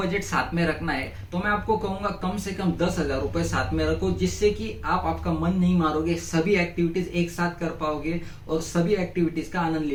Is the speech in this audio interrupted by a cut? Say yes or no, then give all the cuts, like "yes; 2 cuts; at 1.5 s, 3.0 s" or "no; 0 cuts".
no; 0 cuts